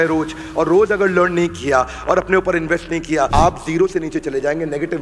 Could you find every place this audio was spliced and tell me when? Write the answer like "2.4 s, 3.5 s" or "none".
3.3 s